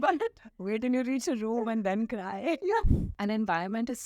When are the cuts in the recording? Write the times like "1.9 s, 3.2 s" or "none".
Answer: 3.0 s

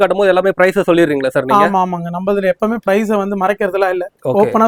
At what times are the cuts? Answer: none

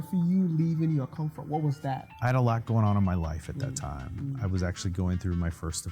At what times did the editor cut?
2.1 s

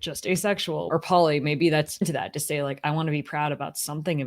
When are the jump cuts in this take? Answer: 0.9 s, 2.0 s

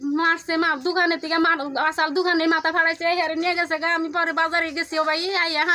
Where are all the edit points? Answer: none

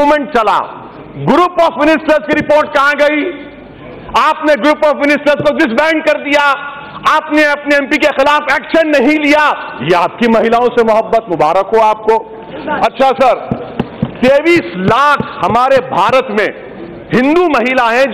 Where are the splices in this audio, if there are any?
none

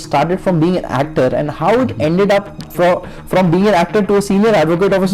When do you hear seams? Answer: none

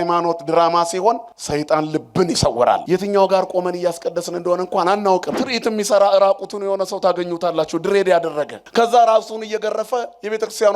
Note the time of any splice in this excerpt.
1.3 s, 2.8 s, 5.4 s, 8.6 s

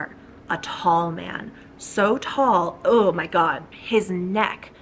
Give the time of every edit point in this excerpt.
3.7 s

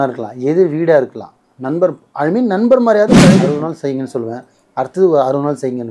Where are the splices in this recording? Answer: 3.5 s

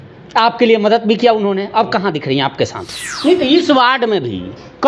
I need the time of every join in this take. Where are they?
3.1 s

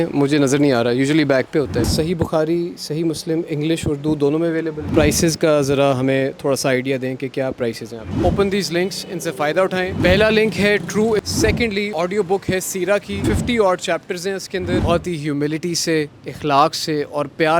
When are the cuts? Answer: 1.9 s, 4.8 s, 8.1 s, 11.4 s, 14.8 s

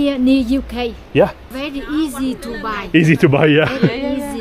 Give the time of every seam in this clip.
1.5 s

